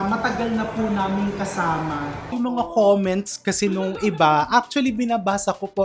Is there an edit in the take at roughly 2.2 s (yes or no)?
yes